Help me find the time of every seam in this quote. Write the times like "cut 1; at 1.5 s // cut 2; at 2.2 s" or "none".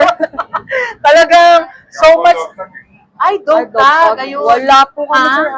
none